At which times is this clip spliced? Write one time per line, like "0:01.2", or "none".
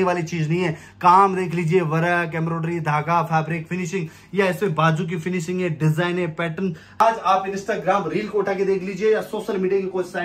0:05.1
0:07.0